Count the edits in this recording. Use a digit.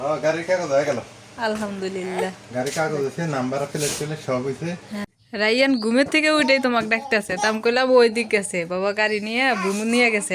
1